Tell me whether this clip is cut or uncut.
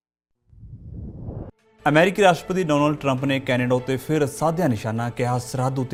uncut